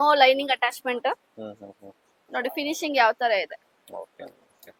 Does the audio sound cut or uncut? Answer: uncut